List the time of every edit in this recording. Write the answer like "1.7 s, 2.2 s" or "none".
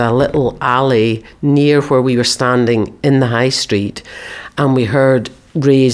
none